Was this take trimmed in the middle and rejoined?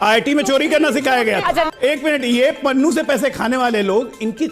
yes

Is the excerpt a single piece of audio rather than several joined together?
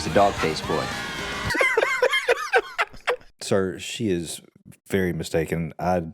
no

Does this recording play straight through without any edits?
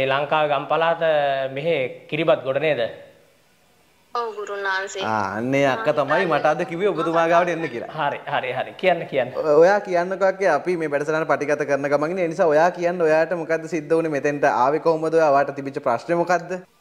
yes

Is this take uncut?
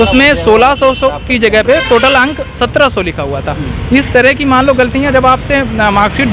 yes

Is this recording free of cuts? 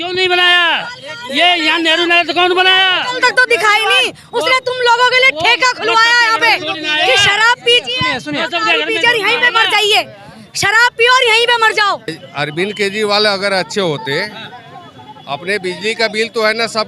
no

